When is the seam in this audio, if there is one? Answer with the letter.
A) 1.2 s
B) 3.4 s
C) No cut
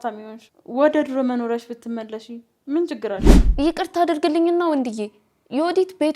B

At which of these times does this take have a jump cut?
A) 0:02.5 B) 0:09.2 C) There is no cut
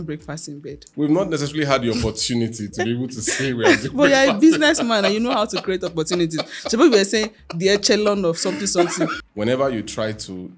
B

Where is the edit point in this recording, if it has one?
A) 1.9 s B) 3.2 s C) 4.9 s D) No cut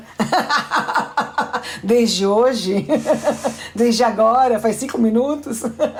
D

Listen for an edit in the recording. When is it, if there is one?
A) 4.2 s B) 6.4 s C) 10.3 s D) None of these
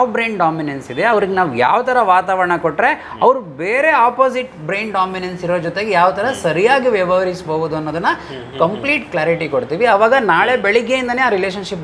D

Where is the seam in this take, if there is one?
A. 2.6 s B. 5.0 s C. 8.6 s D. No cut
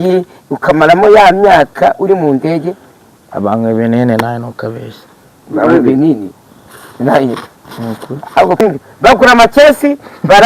C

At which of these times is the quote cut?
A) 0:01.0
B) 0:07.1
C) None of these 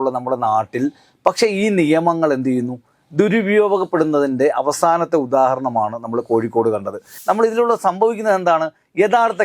B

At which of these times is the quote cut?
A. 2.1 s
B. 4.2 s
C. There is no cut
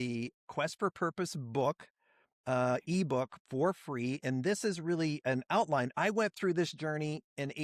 C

